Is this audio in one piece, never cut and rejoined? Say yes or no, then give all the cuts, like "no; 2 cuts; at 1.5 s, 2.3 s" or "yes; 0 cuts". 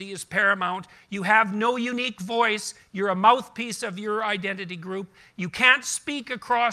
yes; 0 cuts